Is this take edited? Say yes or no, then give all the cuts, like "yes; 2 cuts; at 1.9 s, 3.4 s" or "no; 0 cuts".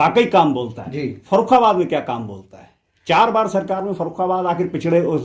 no; 0 cuts